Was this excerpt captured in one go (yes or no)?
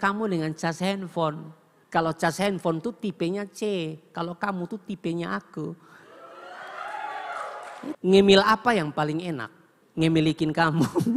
yes